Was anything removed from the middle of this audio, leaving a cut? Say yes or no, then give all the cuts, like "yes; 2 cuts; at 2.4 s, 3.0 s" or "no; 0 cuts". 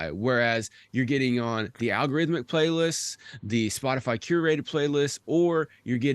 no; 0 cuts